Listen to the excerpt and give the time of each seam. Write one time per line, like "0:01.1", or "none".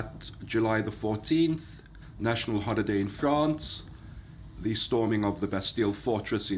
0:02.2